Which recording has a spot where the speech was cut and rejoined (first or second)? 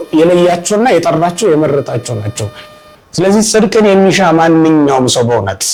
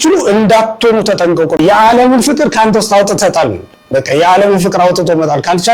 second